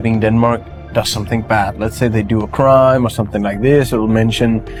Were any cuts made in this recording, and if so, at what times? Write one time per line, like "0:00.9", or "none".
none